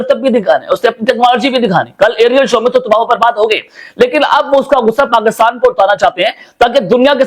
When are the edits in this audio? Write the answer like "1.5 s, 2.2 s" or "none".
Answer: none

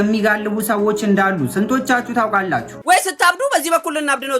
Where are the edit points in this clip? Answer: 2.8 s

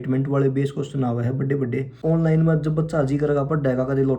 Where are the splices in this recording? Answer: 1.9 s

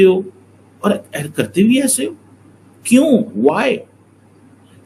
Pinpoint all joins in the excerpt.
none

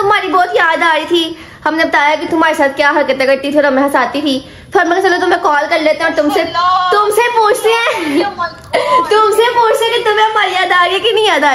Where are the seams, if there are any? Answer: none

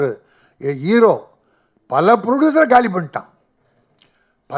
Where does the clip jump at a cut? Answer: none

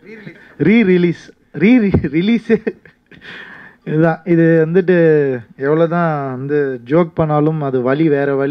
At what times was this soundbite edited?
none

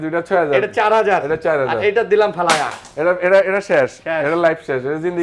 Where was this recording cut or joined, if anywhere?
none

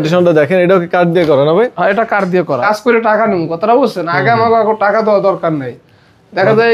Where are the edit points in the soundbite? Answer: 2.6 s

